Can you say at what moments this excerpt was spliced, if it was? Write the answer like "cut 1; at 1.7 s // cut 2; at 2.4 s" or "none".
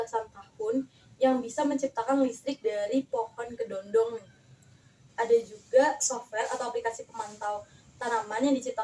cut 1; at 4.9 s